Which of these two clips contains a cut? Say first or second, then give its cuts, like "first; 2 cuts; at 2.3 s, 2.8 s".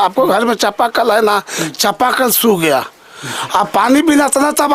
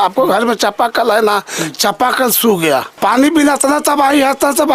second; 1 cut; at 3.0 s